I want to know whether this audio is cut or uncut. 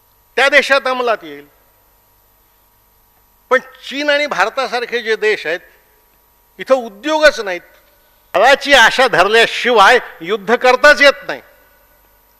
cut